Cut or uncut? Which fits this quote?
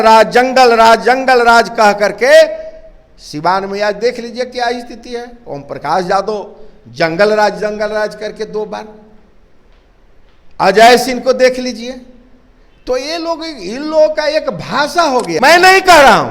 cut